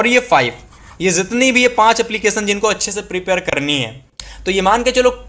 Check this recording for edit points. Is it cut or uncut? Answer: cut